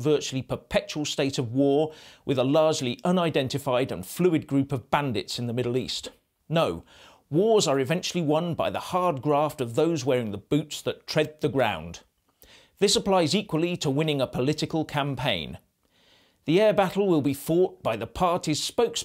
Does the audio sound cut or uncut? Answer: cut